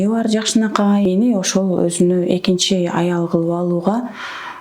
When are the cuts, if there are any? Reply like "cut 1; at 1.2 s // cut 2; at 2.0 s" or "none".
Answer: cut 1; at 1.1 s